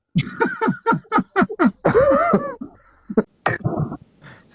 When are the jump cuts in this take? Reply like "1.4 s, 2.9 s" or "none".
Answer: 3.3 s